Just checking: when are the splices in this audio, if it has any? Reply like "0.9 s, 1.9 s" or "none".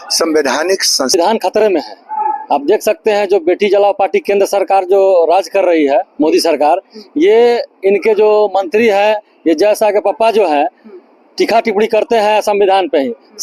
1.1 s